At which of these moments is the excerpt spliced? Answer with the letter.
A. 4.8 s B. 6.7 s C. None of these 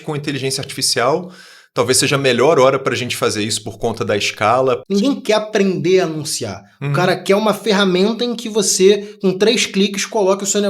A